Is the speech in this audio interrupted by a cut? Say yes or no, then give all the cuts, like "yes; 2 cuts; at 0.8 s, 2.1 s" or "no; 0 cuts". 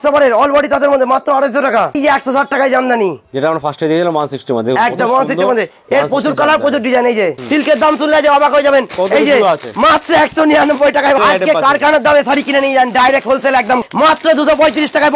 yes; 4 cuts; at 2.0 s, 7.4 s, 11.2 s, 13.9 s